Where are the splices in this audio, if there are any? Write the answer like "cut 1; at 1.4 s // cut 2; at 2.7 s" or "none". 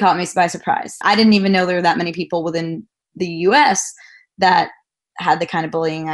cut 1; at 1.0 s // cut 2; at 5.1 s